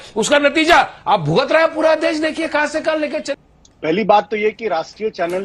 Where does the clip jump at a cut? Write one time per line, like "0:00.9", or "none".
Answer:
0:03.3